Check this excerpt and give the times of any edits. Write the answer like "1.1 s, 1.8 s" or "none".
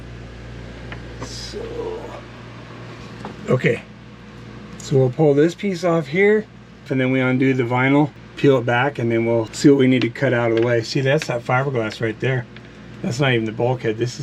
6.9 s, 8.2 s, 9.5 s